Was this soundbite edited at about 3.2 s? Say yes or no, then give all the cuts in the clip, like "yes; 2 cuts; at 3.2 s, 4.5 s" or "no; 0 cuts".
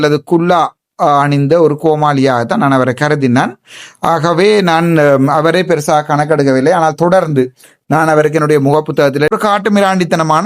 no; 1 cut; at 9.3 s